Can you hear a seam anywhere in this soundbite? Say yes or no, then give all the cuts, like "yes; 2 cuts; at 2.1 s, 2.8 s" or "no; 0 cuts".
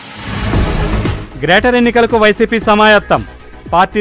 yes; 1 cut; at 1.0 s